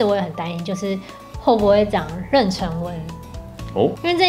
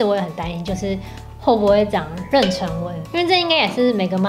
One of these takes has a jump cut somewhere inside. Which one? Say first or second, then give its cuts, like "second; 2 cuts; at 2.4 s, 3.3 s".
second; 1 cut; at 3.1 s